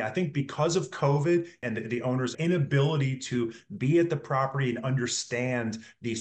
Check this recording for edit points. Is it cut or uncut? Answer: cut